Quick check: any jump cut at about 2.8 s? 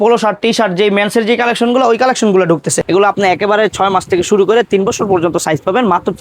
yes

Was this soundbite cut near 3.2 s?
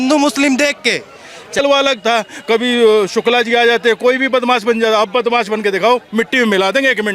no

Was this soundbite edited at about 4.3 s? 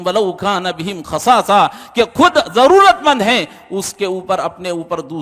no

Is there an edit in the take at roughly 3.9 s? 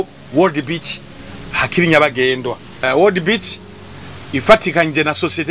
no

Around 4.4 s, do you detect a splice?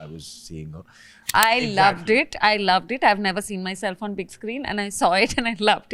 no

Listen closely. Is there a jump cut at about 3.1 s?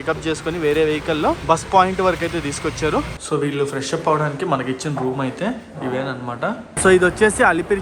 yes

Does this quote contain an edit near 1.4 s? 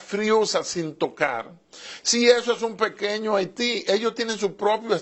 no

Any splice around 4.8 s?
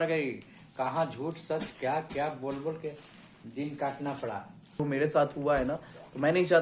yes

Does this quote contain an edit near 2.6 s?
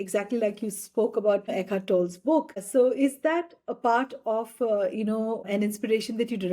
yes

